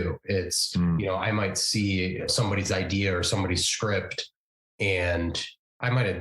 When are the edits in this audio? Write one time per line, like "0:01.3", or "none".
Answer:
0:02.3